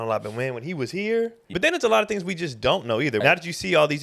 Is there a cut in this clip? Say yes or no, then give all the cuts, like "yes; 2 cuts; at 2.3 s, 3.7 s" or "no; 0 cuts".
yes; 2 cuts; at 1.5 s, 3.2 s